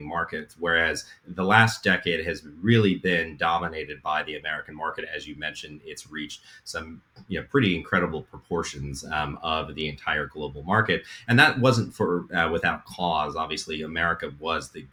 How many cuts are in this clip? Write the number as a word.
zero